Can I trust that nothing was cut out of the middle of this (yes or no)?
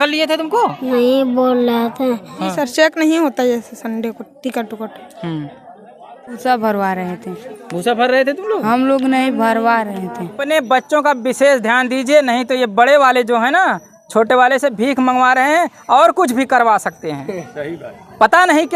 no